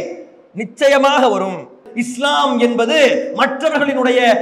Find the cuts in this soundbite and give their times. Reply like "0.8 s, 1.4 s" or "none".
1.9 s